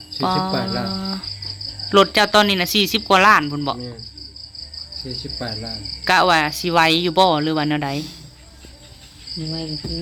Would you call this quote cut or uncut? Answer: uncut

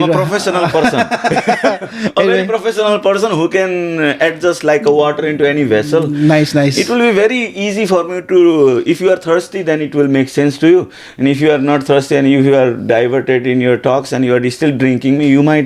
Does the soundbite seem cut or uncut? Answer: uncut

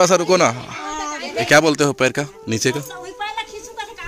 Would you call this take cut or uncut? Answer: cut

